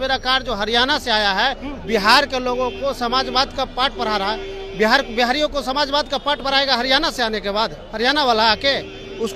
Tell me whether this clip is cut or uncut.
uncut